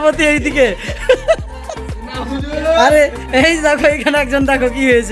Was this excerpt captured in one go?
yes; 0 cuts

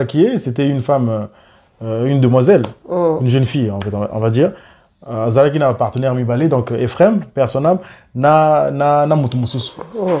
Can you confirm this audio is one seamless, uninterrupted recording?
yes; 0 cuts

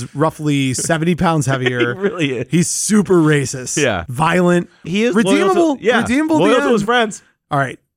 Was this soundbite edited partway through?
yes; 2 cuts; at 4.1 s, 4.8 s

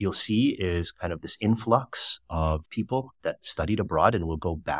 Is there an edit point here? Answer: no; 0 cuts

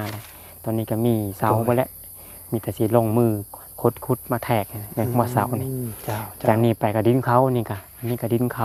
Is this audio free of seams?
yes; 0 cuts

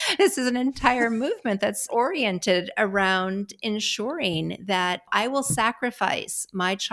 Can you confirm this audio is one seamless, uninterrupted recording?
no; 2 cuts; at 1.8 s, 5.1 s

